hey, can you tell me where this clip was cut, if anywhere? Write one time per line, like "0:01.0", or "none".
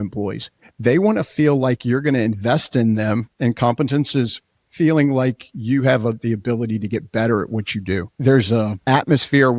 0:08.1
0:08.8